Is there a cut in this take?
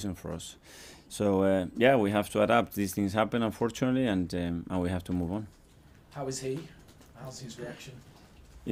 no; 0 cuts

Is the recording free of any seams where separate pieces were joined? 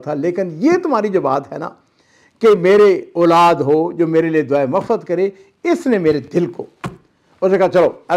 yes; 0 cuts

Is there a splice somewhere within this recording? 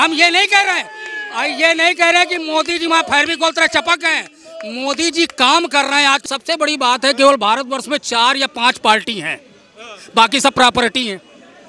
yes; 1 cut; at 6.3 s

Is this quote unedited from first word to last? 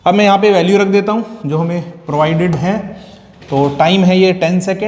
yes; 0 cuts

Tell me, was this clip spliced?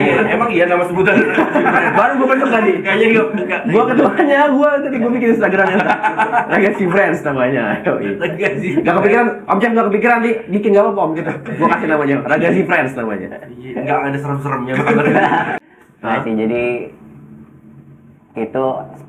yes; 1 cut; at 15.5 s

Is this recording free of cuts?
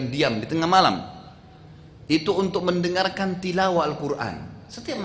yes; 0 cuts

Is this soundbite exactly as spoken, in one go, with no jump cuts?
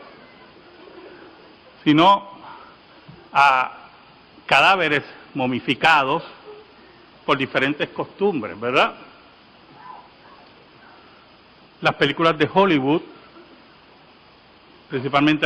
no; 1 cut; at 7.9 s

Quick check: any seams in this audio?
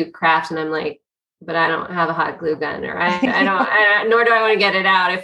no; 0 cuts

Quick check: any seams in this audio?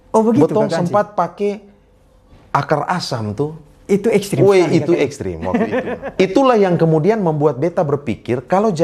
yes; 1 cut; at 6.0 s

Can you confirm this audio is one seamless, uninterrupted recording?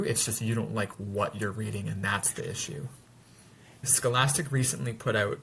no; 1 cut; at 3.8 s

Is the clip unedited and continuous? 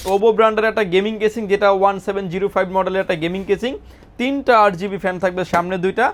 yes; 0 cuts

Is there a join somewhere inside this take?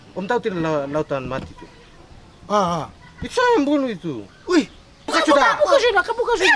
yes; 1 cut; at 5.1 s

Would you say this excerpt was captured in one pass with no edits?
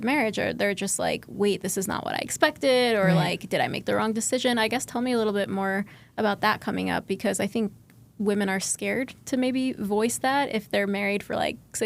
yes; 0 cuts

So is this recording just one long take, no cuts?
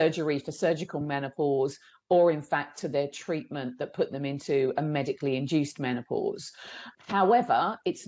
no; 1 cut; at 6.8 s

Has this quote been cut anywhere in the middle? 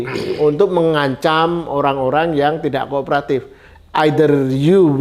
no; 0 cuts

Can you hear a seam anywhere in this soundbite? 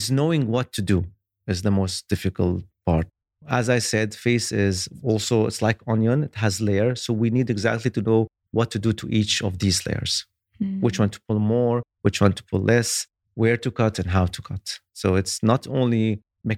yes; 1 cut; at 3.1 s

